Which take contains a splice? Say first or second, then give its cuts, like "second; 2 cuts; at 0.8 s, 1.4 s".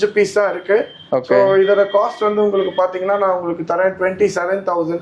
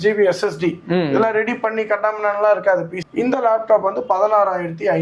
second; 1 cut; at 3.5 s